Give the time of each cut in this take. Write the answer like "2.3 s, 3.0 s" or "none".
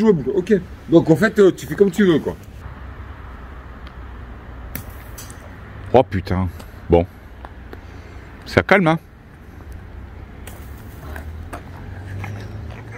none